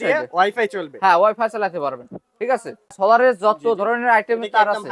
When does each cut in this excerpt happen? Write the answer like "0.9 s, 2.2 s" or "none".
3.0 s